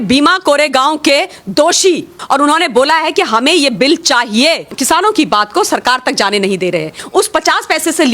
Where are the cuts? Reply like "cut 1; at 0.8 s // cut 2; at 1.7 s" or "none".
cut 1; at 2.2 s // cut 2; at 4.7 s // cut 3; at 7.0 s